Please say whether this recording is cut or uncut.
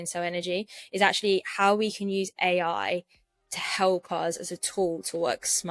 uncut